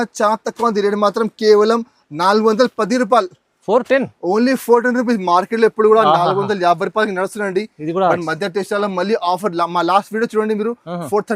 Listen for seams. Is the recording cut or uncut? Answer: uncut